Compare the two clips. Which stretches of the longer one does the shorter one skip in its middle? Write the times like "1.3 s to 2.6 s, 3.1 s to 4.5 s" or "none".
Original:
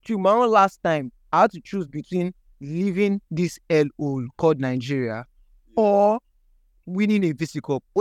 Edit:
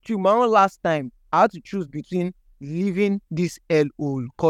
none